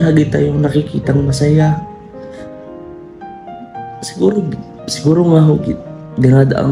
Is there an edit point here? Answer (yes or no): no